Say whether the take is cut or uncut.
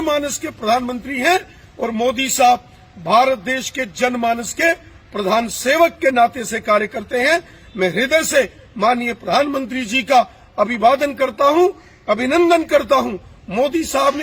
uncut